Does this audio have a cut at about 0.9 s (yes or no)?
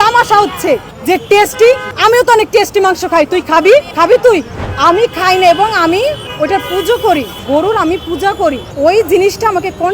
yes